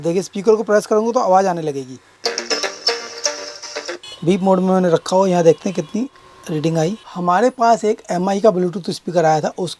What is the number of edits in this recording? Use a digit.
3